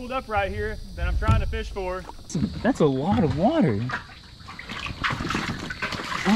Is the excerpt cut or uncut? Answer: cut